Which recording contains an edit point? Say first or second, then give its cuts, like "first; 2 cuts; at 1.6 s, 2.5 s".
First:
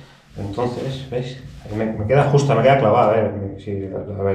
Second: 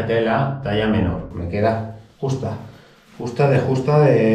second; 1 cut; at 1.4 s